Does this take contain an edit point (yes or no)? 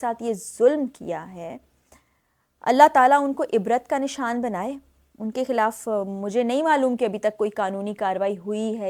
no